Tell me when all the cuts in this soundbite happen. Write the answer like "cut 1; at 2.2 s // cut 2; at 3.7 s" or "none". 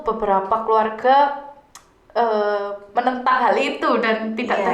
none